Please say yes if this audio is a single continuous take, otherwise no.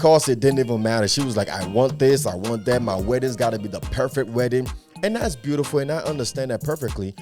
yes